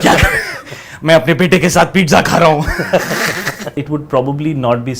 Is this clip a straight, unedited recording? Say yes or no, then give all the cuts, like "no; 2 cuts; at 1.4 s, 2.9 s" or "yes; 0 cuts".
no; 1 cut; at 3.8 s